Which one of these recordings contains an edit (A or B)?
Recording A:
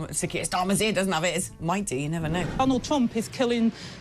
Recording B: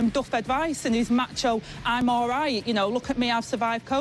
A